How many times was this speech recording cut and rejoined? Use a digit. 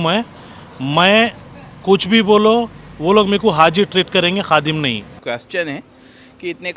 1